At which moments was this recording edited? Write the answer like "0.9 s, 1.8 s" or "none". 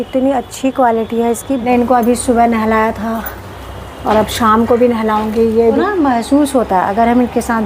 1.7 s, 5.8 s